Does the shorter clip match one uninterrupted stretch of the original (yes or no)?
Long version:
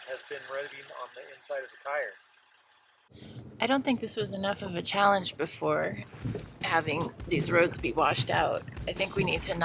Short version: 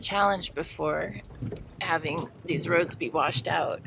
yes